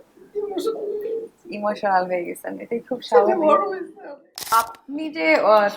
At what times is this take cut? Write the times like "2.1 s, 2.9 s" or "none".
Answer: 4.5 s